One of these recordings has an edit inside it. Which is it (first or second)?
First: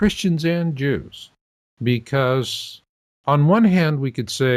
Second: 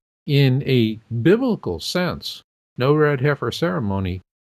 first